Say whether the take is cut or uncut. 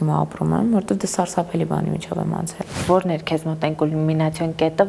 cut